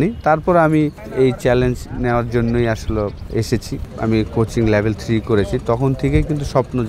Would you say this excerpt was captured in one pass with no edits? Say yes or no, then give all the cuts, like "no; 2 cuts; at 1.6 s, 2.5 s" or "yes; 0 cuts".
no; 2 cuts; at 1.0 s, 3.5 s